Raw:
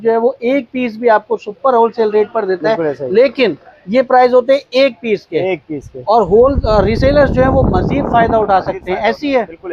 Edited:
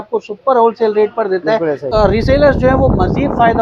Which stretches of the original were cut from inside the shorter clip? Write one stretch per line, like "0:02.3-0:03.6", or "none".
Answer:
0:03.0-0:06.6